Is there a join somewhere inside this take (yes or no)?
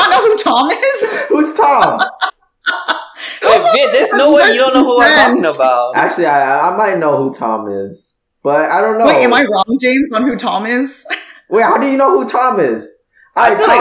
no